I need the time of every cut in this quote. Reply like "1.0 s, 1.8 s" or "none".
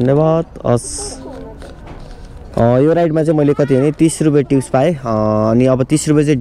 2.5 s